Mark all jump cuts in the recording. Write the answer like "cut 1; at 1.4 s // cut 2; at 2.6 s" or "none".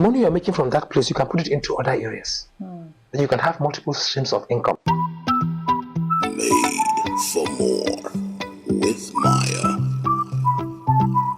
cut 1; at 4.8 s